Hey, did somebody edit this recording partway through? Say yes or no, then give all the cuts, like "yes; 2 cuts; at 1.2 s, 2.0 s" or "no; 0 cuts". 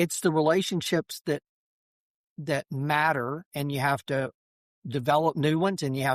no; 0 cuts